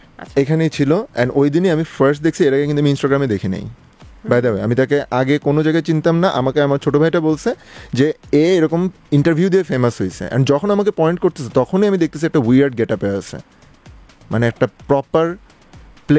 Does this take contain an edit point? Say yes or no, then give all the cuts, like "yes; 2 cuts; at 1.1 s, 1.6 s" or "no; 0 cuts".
no; 0 cuts